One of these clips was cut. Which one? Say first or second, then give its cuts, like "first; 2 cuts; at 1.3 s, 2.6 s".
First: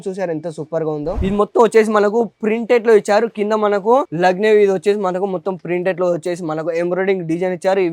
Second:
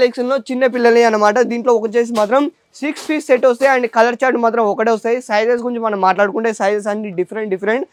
first; 1 cut; at 1.2 s